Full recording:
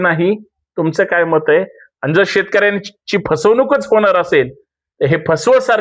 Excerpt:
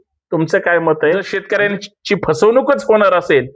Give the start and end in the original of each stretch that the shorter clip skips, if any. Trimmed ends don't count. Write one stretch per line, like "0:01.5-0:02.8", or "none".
0:01.8-0:02.4